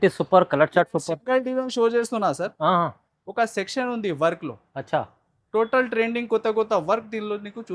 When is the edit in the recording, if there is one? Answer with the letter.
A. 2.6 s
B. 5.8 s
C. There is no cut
C